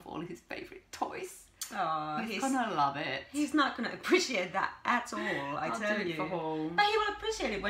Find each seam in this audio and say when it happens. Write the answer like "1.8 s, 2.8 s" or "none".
none